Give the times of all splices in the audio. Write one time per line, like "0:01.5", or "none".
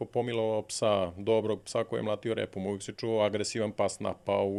none